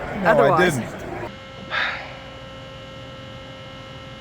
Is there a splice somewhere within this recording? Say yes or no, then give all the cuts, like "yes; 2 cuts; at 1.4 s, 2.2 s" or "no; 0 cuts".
yes; 1 cut; at 1.3 s